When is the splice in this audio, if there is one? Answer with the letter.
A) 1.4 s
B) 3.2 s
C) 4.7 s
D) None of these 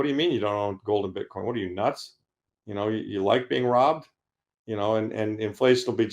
D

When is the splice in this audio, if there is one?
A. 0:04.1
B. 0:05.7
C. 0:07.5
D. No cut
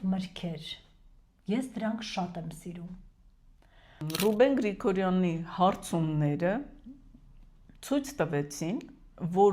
A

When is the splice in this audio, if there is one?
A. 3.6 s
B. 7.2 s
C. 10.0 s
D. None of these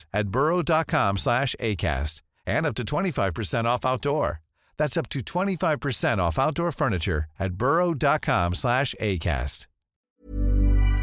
C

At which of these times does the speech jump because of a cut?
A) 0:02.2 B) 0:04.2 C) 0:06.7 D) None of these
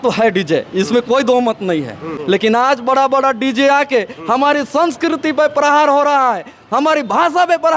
A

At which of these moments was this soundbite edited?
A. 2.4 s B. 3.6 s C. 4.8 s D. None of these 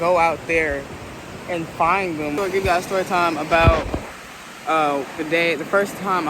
A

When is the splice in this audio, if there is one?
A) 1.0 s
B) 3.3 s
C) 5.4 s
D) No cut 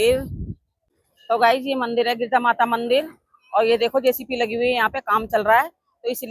A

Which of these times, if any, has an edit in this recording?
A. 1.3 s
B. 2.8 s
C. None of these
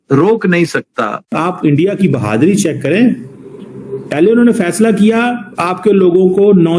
A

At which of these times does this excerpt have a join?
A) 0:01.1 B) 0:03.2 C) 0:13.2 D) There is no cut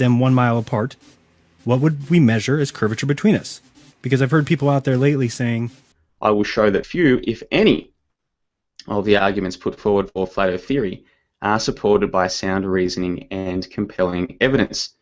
B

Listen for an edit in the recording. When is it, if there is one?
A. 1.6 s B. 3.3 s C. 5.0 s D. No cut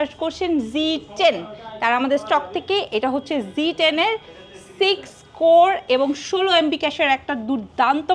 D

